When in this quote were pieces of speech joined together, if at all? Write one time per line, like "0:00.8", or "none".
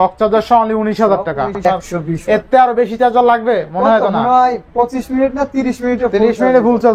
0:01.6